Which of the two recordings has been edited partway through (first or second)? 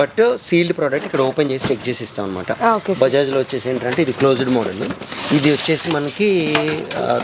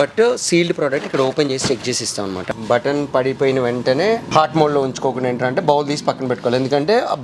second